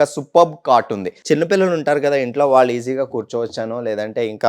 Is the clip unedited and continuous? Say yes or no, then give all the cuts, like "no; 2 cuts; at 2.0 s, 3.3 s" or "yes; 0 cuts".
no; 1 cut; at 1.1 s